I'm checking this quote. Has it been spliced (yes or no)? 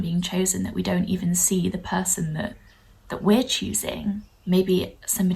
yes